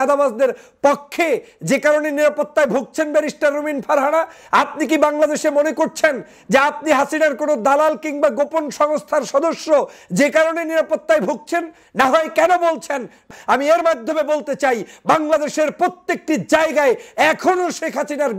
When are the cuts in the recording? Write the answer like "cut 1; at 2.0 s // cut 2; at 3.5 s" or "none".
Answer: cut 1; at 13.3 s

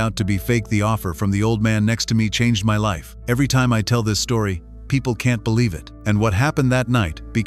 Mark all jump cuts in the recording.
cut 1; at 3.1 s // cut 2; at 5.9 s

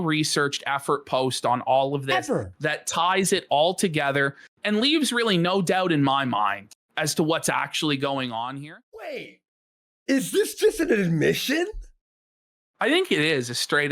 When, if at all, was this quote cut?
cut 1; at 8.5 s

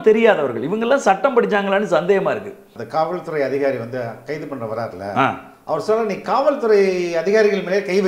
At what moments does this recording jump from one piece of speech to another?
cut 1; at 2.8 s

